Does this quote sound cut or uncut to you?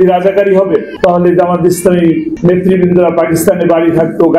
cut